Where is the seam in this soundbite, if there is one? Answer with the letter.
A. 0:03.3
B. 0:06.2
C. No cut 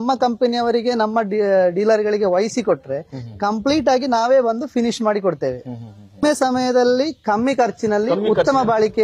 B